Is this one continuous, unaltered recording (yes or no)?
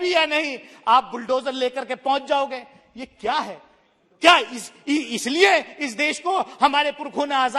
yes